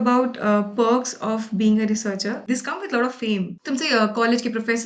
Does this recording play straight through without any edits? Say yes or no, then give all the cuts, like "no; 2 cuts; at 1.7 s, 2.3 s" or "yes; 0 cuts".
no; 2 cuts; at 2.4 s, 3.5 s